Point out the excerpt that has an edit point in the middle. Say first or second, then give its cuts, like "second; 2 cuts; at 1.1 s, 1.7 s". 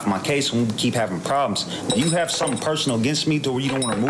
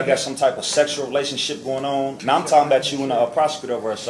second; 1 cut; at 2.2 s